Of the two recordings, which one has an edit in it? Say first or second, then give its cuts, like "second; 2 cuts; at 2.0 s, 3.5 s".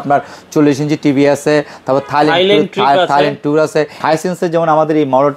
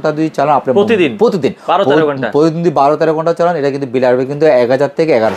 first; 1 cut; at 4.0 s